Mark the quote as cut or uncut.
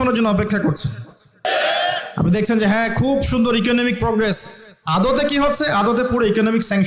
cut